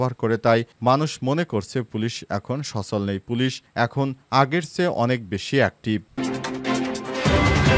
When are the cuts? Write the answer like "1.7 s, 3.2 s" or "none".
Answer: 6.1 s